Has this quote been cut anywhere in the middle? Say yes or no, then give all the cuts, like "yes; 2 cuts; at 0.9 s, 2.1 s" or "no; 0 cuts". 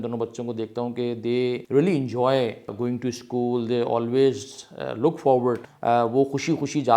yes; 3 cuts; at 1.6 s, 2.7 s, 5.7 s